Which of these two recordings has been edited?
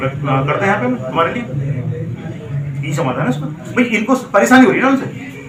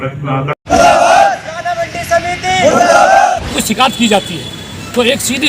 second; 2 cuts; at 0.7 s, 3.5 s

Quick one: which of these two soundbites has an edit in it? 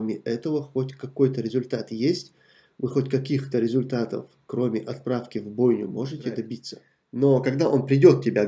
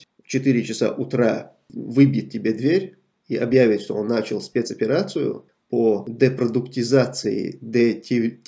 first; 1 cut; at 7.1 s

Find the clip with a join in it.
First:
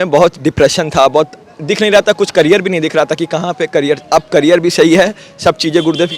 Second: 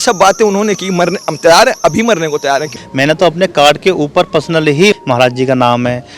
second; 2 cuts; at 2.8 s, 4.9 s

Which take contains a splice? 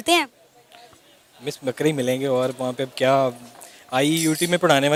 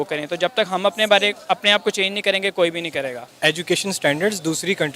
second; 1 cut; at 3.2 s

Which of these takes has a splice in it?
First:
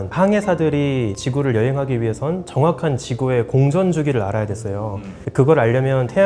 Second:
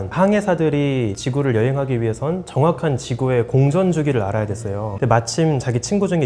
second; 1 cut; at 4.9 s

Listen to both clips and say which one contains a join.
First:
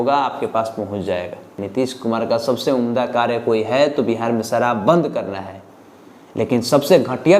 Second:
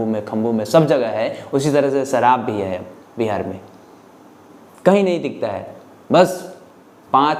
first; 1 cut; at 1.6 s

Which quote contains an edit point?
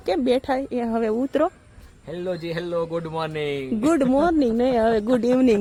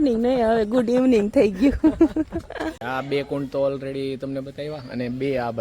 second; 1 cut; at 2.8 s

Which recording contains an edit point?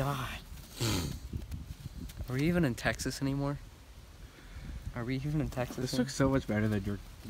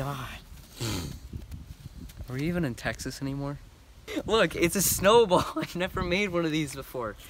second; 1 cut; at 3.9 s

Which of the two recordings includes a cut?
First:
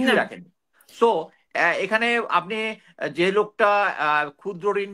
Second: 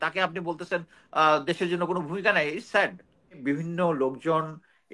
second; 1 cut; at 3.4 s

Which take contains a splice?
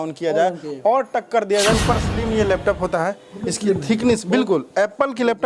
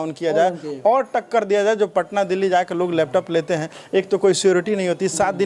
first; 1 cut; at 1.8 s

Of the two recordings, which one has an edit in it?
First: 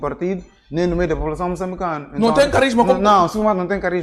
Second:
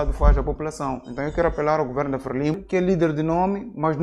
second; 1 cut; at 2.6 s

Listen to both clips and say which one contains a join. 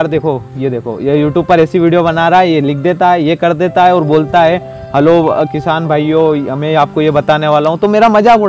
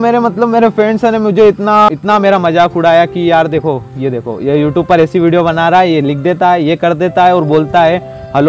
second; 1 cut; at 1.9 s

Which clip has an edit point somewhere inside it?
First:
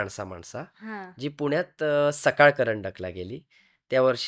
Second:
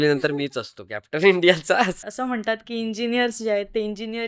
second; 1 cut; at 2.0 s

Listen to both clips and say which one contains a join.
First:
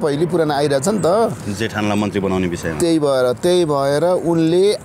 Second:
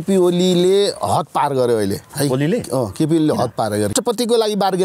second; 2 cuts; at 2.1 s, 3.9 s

